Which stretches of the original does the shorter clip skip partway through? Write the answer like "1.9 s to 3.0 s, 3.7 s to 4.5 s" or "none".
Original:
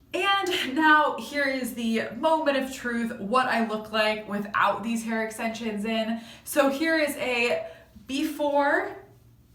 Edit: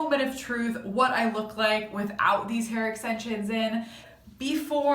6.4 s to 7.7 s